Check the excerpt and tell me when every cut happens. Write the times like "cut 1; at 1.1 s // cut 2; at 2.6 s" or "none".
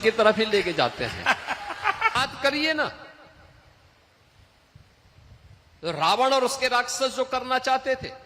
cut 1; at 2.1 s